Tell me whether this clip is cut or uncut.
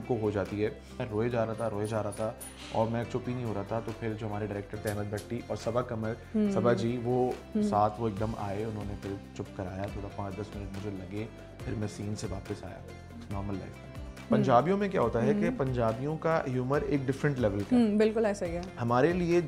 cut